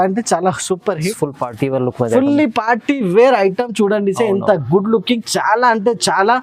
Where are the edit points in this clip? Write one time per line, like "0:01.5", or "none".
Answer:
0:01.1